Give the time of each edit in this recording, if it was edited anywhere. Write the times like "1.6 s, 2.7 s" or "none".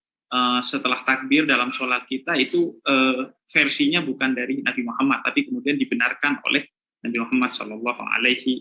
none